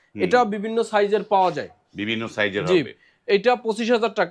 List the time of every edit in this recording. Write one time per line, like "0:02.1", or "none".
none